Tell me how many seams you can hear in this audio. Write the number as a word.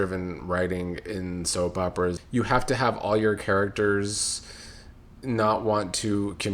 one